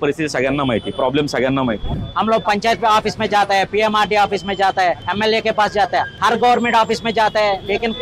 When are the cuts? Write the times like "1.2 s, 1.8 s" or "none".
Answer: 1.9 s, 5.0 s, 6.1 s